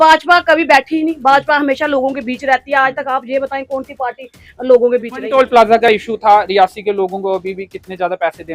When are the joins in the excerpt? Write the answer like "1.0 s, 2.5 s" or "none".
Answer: 5.2 s